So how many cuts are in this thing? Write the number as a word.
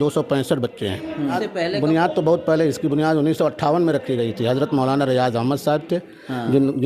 one